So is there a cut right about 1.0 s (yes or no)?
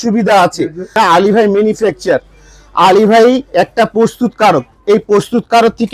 yes